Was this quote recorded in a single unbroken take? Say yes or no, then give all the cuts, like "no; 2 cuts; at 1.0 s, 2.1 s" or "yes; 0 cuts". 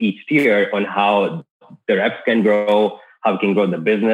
yes; 0 cuts